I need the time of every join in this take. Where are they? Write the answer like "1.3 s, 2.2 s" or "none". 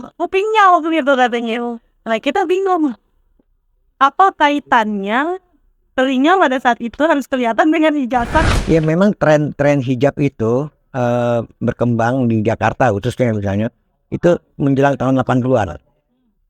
8.5 s

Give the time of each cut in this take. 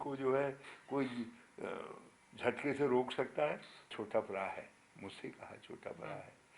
3.9 s

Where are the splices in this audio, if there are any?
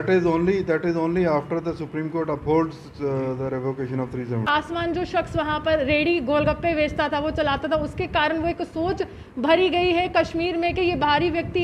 4.5 s

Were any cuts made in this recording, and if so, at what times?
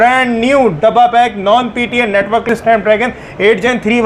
2.5 s

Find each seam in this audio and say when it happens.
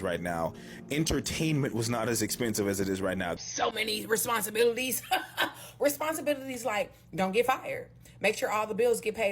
3.4 s

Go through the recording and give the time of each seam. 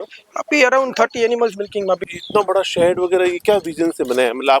2.0 s

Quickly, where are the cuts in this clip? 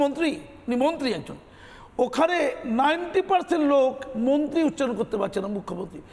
none

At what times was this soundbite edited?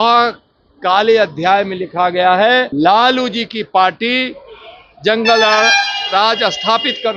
2.7 s

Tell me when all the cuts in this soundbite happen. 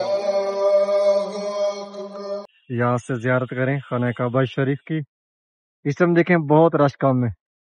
2.5 s

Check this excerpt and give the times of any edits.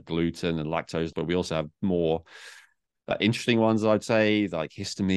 1.1 s, 3.1 s

